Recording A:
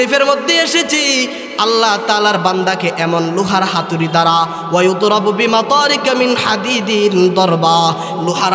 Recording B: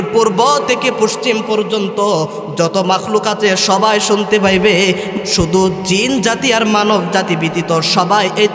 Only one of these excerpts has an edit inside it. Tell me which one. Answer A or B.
B